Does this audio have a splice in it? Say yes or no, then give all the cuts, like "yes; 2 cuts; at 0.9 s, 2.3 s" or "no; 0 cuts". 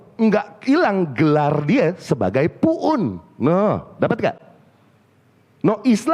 no; 0 cuts